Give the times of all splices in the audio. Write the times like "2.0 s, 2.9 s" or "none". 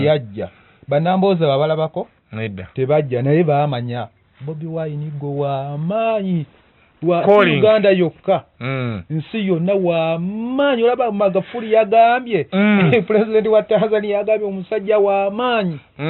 none

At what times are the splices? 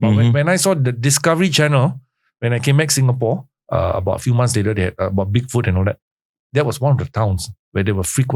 none

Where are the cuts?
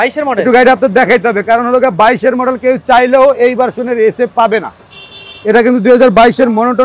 none

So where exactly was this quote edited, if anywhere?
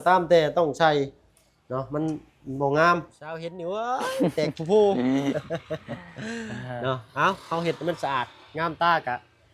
3.5 s

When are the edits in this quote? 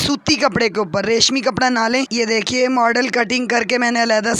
2.1 s

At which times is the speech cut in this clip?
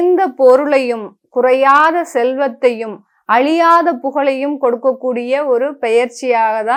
none

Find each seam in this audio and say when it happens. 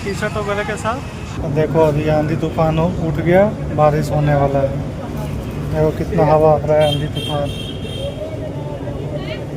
1.4 s

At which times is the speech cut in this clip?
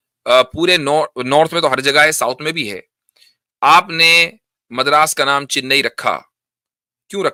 none

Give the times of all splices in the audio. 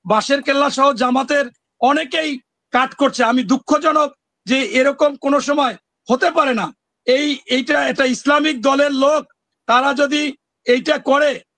none

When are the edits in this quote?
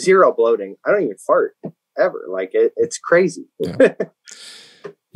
none

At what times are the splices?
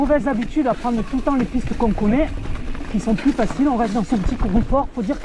none

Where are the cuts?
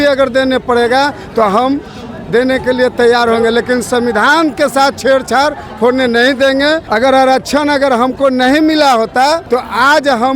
6.8 s, 9.4 s

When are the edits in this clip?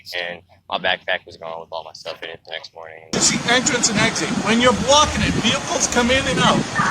3.1 s

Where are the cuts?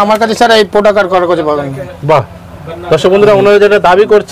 none

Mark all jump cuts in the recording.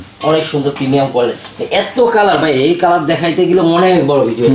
none

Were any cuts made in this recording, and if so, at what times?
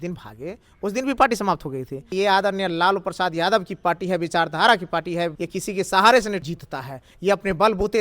2.1 s, 5.4 s, 6.5 s

